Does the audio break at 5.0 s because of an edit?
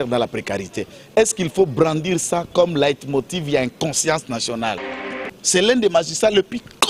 yes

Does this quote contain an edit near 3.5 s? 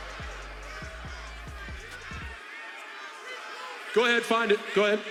no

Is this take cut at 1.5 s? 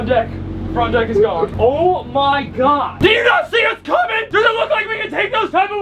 yes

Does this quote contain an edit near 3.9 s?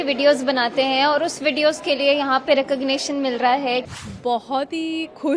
yes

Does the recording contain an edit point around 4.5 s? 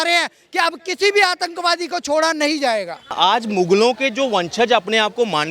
no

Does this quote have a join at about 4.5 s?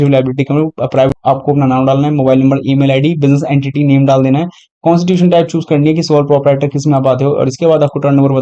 no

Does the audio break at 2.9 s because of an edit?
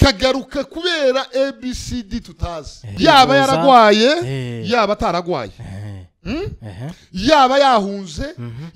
yes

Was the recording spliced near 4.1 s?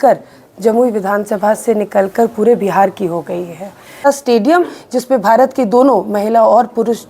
yes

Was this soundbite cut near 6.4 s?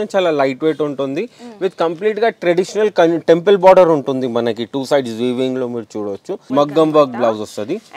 yes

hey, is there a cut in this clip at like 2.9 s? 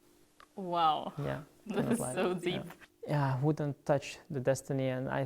yes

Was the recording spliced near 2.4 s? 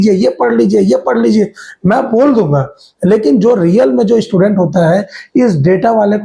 no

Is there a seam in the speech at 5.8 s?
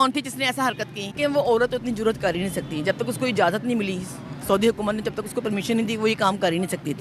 no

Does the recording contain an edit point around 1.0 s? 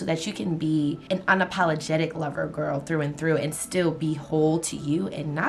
yes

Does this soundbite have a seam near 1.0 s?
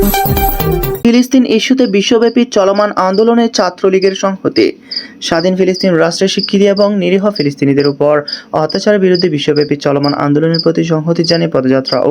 yes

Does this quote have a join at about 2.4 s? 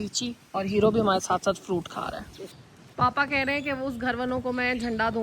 yes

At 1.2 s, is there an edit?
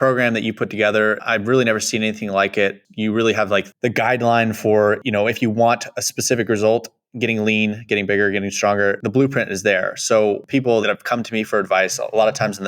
yes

